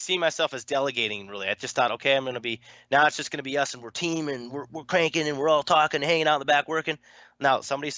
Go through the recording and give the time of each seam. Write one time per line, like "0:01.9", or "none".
none

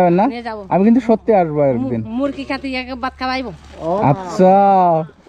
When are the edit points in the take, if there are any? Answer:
none

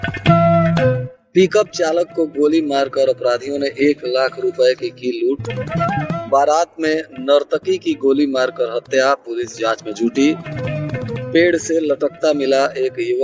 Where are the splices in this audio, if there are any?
0:01.1

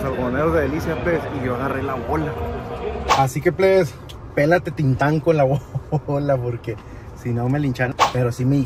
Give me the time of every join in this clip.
0:03.1
0:07.9

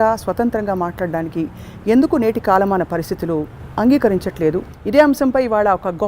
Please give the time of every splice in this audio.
0:04.7

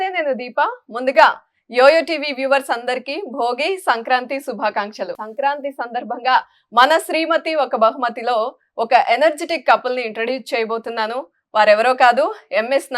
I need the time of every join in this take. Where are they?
0:05.2

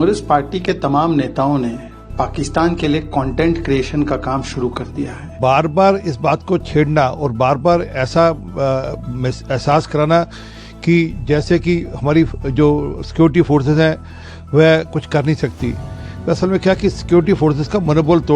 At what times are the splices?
0:05.3

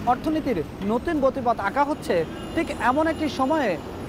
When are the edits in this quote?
none

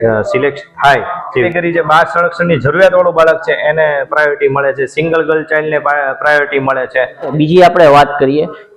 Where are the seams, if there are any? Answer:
0:01.5
0:07.3

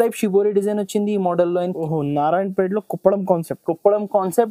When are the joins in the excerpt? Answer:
0:01.8

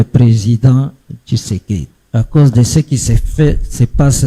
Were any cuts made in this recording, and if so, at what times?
0:02.0

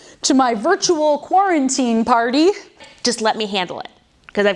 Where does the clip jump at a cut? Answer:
0:02.9

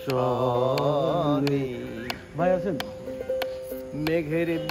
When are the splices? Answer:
none

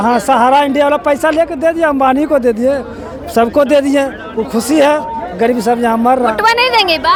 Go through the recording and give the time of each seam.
none

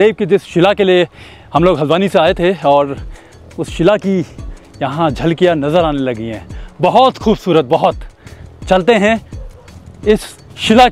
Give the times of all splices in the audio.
none

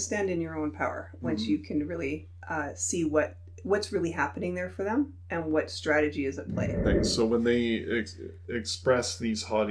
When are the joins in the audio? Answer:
0:06.8

